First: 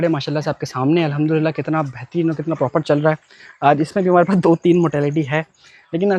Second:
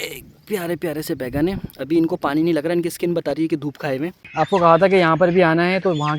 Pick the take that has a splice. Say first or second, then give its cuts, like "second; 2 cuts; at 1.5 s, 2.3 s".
second; 1 cut; at 4.2 s